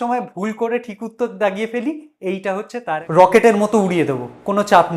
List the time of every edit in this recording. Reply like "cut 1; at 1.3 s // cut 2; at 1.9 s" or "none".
cut 1; at 2.7 s